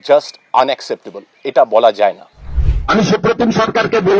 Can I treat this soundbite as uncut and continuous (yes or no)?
no